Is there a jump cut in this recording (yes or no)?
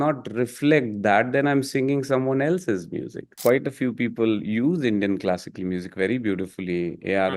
yes